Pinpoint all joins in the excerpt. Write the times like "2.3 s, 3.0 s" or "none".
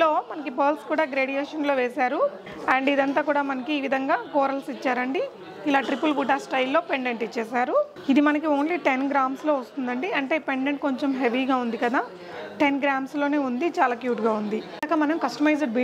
none